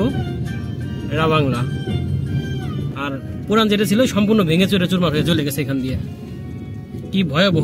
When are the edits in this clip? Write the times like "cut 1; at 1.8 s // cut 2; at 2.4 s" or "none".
cut 1; at 2.9 s